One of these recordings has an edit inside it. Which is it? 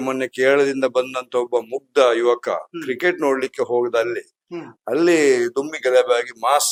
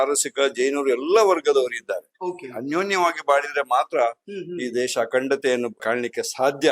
second; 1 cut; at 5.8 s

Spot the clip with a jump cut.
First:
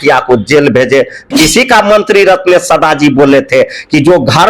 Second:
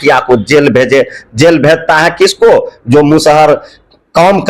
first; 1 cut; at 1.3 s

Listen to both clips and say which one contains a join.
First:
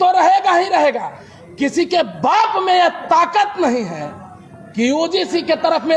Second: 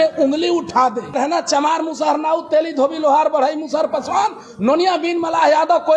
second; 1 cut; at 1.1 s

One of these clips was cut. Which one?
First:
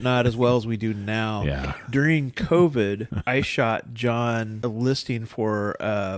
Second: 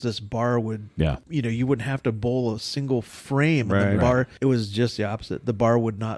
first; 2 cuts; at 3.1 s, 4.5 s

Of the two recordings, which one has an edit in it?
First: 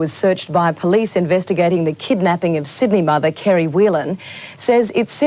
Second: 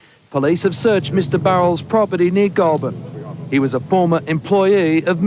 second; 1 cut; at 2.5 s

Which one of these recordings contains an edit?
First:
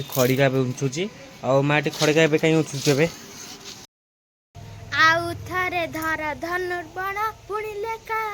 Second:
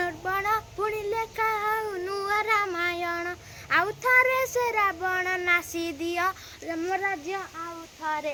first; 1 cut; at 3.9 s

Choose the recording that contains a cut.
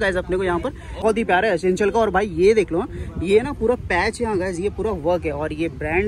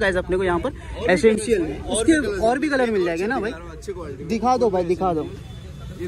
first; 1 cut; at 1.0 s

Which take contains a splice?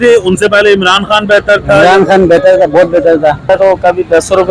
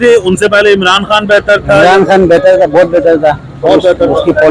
first; 1 cut; at 3.5 s

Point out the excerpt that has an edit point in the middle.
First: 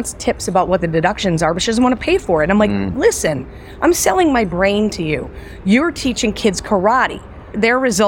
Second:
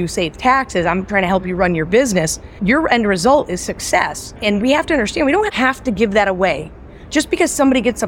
second; 2 cuts; at 2.6 s, 4.2 s

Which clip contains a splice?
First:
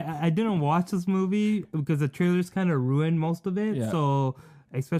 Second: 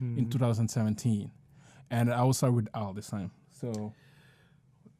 first; 1 cut; at 1.7 s

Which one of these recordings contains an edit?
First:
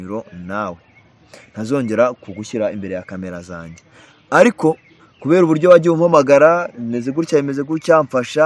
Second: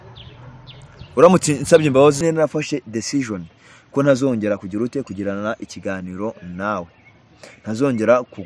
second; 1 cut; at 2.2 s

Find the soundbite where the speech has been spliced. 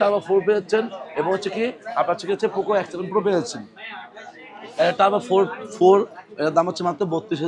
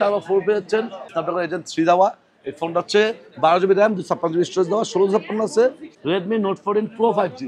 second; 2 cuts; at 1.0 s, 5.9 s

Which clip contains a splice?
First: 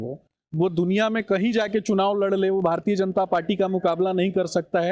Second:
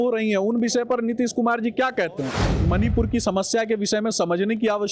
second; 1 cut; at 2.4 s

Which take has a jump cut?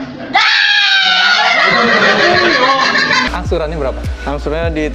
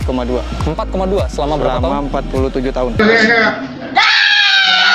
first; 1 cut; at 3.3 s

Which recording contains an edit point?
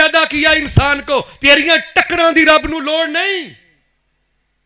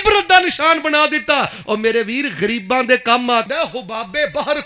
second; 1 cut; at 3.5 s

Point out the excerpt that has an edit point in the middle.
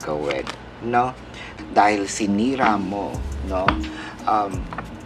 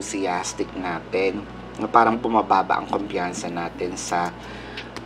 first; 1 cut; at 1.6 s

